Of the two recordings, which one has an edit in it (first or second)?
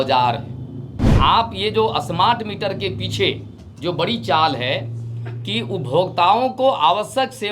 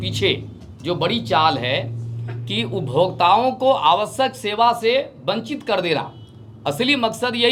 first